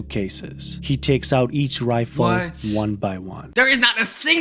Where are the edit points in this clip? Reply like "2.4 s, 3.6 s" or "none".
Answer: 3.4 s